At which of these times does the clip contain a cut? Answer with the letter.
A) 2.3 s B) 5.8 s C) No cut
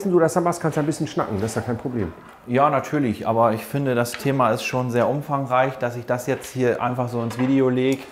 C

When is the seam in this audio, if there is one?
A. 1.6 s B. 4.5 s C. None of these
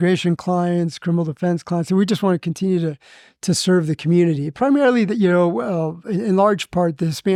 C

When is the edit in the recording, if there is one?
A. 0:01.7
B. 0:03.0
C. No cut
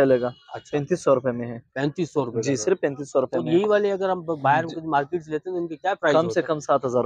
C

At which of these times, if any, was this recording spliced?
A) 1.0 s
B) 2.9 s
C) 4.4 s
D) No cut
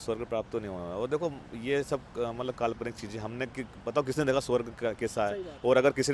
D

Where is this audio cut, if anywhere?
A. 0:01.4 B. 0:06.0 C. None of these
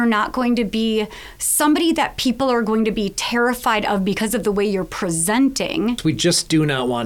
B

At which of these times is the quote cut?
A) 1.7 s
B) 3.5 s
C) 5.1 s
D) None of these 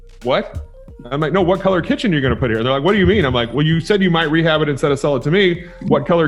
D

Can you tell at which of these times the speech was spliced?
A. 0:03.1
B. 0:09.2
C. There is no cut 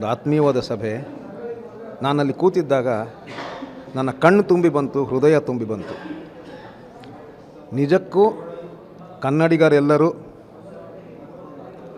C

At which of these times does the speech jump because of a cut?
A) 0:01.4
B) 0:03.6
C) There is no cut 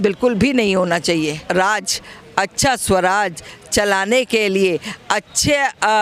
A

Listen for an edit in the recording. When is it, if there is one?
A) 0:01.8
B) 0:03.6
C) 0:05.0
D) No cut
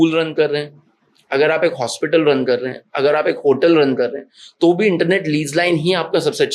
D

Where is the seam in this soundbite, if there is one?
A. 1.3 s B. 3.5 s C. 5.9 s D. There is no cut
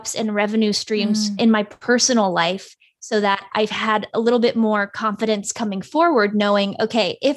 A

